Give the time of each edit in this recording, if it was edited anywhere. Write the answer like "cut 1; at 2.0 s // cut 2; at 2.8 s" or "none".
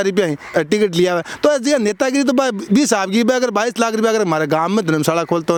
none